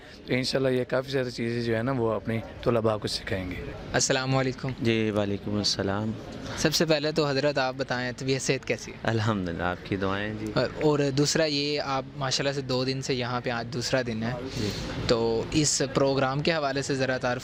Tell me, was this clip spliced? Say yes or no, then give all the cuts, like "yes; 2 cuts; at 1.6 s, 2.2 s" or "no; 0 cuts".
no; 0 cuts